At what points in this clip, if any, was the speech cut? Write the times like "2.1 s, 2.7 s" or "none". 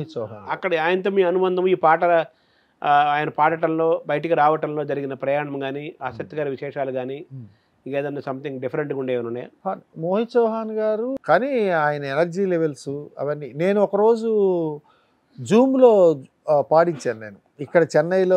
9.5 s, 11.1 s